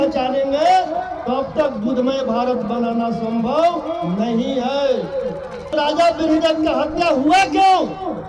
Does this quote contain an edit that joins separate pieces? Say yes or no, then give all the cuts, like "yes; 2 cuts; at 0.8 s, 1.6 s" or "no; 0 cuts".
yes; 1 cut; at 5.7 s